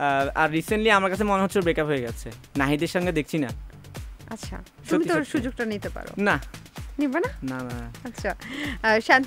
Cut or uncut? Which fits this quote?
uncut